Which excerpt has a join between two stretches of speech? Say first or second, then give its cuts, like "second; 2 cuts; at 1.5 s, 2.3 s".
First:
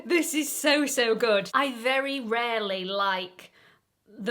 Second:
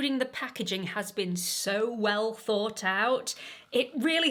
first; 1 cut; at 1.5 s